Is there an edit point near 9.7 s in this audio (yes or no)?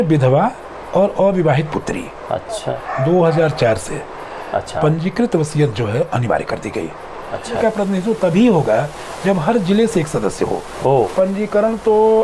no